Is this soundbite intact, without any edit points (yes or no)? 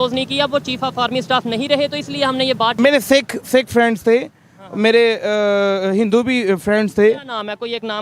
no